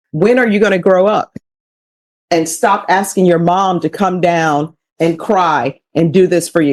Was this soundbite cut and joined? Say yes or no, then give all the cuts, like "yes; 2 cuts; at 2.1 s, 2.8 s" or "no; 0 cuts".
no; 0 cuts